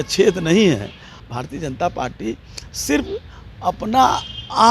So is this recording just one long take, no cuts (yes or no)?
no